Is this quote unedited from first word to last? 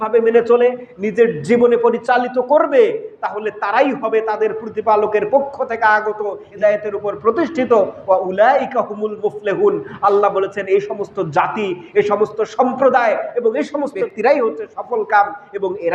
no; 2 cuts; at 6.5 s, 14.1 s

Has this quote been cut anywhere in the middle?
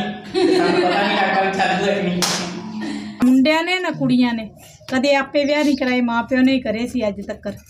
yes; 1 cut; at 3.2 s

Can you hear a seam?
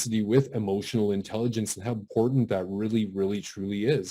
yes; 1 cut; at 2.1 s

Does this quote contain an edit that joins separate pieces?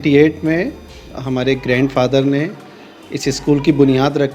no; 0 cuts

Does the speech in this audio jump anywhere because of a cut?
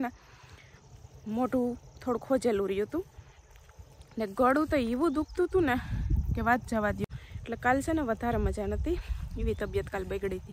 yes; 1 cut; at 7.2 s

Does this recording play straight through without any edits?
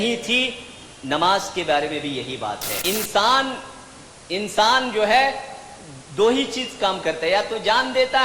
no; 1 cut; at 2.7 s

